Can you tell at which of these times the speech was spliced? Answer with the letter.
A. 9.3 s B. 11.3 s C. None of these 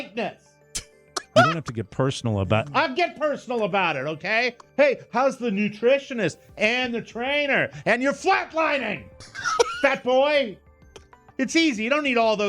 B